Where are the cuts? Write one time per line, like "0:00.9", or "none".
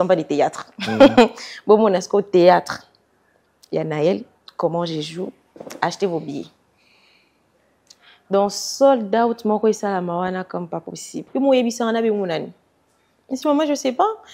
0:11.2